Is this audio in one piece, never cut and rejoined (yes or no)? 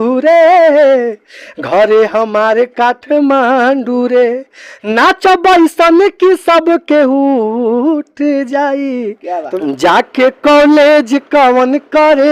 no